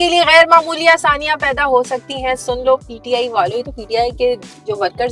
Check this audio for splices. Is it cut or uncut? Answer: uncut